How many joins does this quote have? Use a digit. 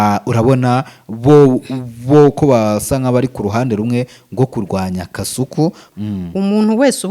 1